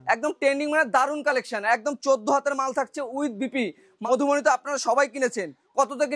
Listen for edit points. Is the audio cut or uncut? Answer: cut